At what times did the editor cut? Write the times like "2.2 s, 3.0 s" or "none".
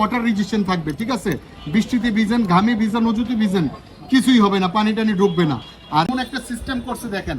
6.1 s